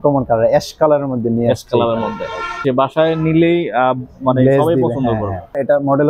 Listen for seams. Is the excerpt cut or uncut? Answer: uncut